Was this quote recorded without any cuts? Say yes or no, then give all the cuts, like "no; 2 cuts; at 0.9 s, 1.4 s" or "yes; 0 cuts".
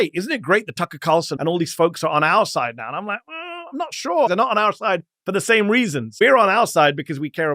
no; 3 cuts; at 1.3 s, 4.3 s, 6.1 s